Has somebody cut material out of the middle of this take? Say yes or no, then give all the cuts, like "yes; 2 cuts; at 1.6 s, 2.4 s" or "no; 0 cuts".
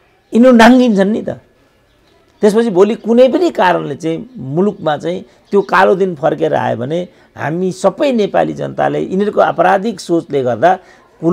no; 0 cuts